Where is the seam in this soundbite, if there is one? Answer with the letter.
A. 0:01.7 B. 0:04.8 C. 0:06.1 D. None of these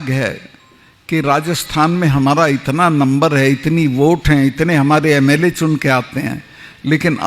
D